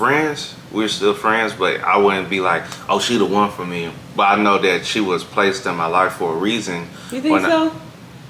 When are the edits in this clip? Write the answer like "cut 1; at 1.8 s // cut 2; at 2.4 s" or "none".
none